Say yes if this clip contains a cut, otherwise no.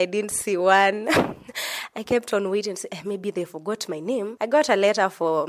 yes